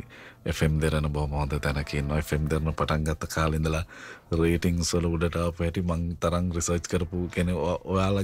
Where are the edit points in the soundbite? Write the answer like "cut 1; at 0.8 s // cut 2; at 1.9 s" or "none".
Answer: none